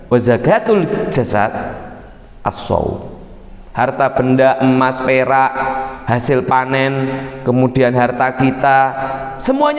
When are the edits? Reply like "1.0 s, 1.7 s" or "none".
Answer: none